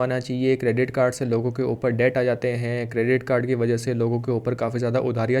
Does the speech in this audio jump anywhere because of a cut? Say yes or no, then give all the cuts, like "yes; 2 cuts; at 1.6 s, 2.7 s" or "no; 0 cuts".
no; 0 cuts